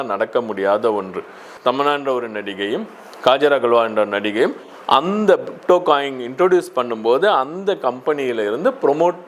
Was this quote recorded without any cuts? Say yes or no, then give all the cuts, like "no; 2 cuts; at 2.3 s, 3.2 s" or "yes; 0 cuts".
no; 1 cut; at 1.5 s